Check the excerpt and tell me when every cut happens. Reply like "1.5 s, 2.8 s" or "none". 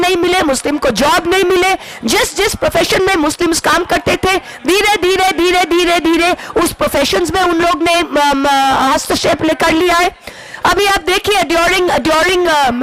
none